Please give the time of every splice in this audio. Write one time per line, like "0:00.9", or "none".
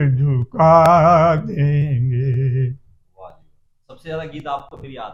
none